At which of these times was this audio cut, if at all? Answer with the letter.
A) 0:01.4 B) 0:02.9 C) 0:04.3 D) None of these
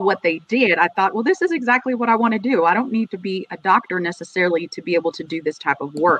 D